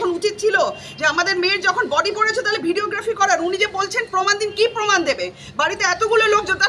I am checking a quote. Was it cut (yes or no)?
no